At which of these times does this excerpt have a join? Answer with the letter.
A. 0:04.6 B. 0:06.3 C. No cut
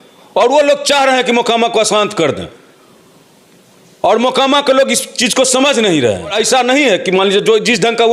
B